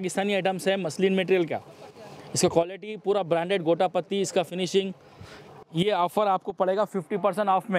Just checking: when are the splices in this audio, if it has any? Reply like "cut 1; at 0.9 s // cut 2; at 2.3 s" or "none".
none